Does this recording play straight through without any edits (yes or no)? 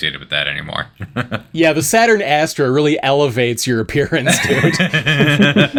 yes